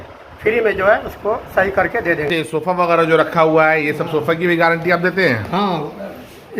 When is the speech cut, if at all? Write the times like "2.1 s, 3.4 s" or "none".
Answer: 2.3 s